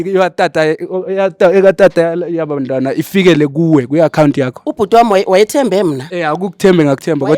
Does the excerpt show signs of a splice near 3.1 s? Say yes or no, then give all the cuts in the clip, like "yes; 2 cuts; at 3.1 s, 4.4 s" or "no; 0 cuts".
no; 2 cuts; at 4.6 s, 6.1 s